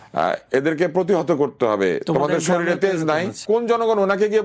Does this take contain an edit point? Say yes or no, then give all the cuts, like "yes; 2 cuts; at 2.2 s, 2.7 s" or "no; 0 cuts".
yes; 1 cut; at 3.4 s